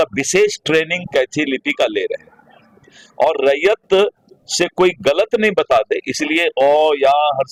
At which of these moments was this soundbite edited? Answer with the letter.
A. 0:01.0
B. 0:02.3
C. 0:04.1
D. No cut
D